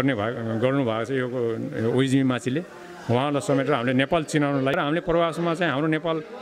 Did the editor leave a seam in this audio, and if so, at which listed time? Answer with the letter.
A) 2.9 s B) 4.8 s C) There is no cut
B